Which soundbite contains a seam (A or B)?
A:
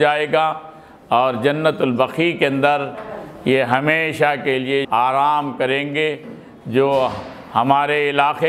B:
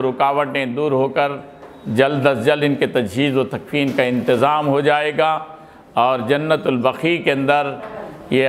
A